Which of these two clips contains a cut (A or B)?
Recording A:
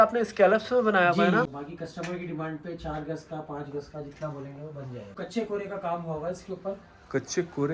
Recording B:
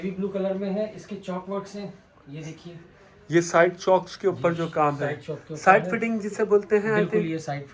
A